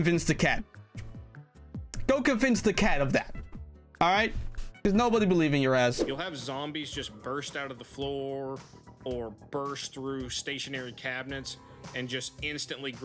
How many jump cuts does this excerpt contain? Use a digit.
1